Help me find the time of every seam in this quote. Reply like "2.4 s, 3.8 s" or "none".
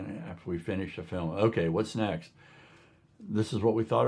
none